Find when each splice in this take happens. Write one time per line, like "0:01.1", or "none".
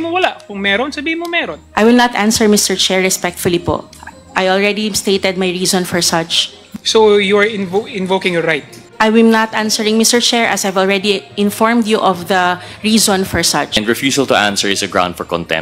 0:08.8
0:13.8